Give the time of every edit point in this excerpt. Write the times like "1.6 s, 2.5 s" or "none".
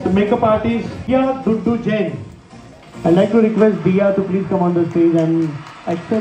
1.1 s